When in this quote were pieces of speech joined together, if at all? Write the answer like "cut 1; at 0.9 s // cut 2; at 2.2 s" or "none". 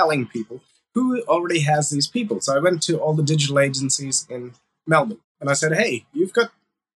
cut 1; at 5.2 s